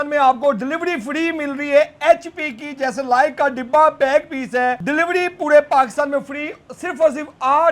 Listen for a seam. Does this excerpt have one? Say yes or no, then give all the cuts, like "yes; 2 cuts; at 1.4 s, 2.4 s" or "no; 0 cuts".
yes; 1 cut; at 4.8 s